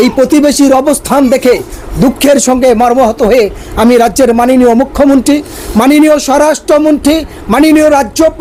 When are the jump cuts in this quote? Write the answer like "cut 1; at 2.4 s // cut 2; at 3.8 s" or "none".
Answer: none